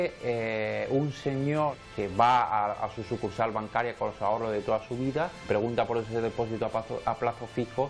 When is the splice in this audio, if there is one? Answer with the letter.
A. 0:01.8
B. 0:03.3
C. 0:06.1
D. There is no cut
A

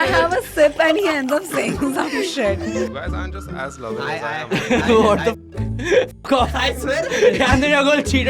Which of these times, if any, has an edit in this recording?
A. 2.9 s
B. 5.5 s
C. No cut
A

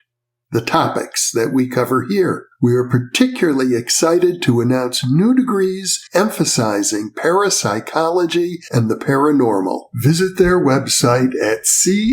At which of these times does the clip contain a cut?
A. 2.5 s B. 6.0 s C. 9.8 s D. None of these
D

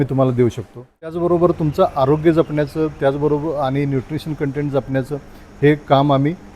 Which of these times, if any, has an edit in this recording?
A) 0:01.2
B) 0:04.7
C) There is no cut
A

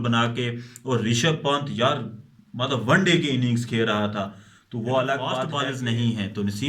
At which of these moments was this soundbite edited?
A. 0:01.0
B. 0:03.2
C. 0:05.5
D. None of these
C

